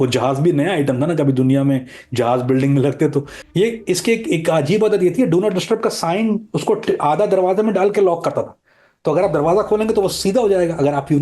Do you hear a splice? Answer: yes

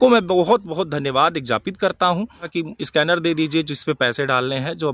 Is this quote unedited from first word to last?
no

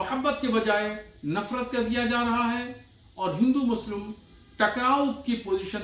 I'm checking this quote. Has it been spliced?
no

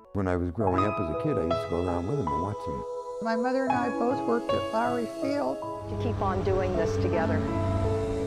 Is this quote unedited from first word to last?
yes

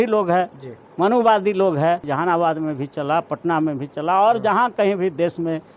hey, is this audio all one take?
no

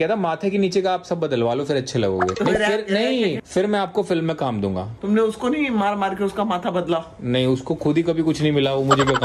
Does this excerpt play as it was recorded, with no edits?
yes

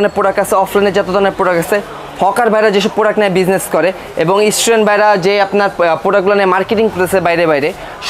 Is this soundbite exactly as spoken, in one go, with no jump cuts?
yes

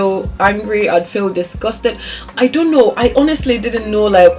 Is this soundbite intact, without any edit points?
yes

